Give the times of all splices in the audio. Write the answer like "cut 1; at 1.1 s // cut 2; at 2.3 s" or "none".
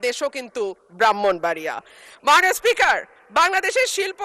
none